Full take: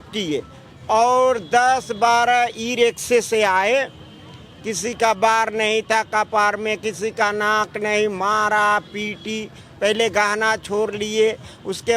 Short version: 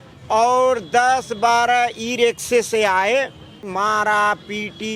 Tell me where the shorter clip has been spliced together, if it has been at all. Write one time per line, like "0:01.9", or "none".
0:03.7